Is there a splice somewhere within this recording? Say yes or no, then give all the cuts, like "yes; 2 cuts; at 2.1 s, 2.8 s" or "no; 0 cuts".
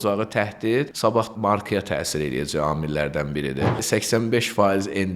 yes; 2 cuts; at 1.2 s, 3.8 s